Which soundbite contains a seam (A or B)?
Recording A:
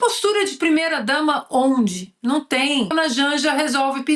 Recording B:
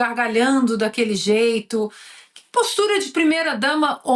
A